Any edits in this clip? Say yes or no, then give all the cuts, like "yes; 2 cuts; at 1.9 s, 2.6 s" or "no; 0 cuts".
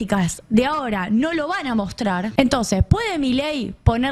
yes; 1 cut; at 2.3 s